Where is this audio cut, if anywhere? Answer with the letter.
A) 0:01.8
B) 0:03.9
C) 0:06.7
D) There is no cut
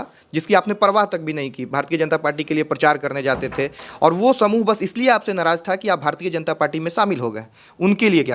D